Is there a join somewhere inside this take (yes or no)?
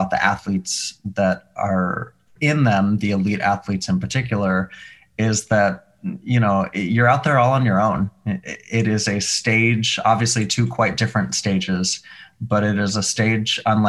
no